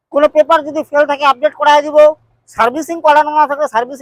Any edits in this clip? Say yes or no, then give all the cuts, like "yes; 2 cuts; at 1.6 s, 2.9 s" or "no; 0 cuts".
no; 0 cuts